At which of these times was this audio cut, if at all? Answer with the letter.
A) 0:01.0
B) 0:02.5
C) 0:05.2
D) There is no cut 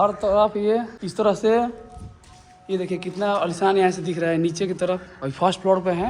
A